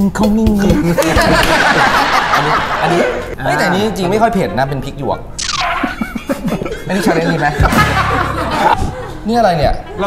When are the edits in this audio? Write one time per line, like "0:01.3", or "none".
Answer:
0:08.8